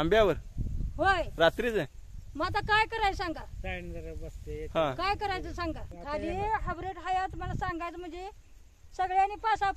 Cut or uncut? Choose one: cut